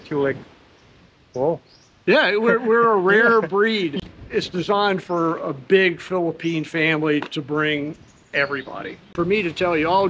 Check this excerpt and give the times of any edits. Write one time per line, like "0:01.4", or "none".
0:04.0
0:09.1

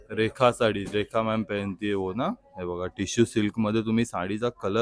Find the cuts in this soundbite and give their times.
none

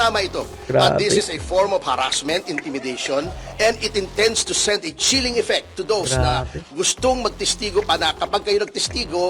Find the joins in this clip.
none

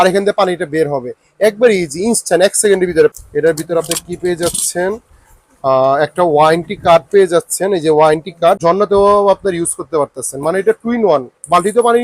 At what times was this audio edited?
0:03.1
0:08.6

